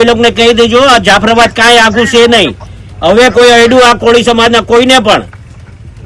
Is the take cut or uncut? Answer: uncut